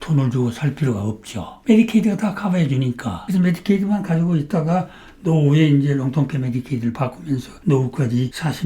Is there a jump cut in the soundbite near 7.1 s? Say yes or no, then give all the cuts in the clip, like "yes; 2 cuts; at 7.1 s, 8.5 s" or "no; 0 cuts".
no; 1 cut; at 1.5 s